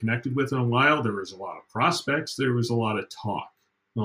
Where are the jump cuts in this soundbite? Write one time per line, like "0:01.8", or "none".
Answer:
none